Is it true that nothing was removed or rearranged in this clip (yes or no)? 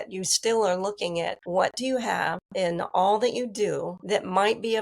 no